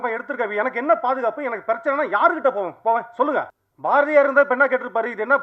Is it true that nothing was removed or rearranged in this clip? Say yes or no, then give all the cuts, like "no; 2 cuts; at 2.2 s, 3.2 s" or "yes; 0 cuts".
no; 1 cut; at 3.6 s